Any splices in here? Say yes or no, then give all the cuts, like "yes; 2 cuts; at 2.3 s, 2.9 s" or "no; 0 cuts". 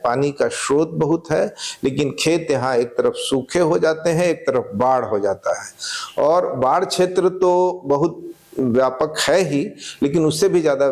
no; 0 cuts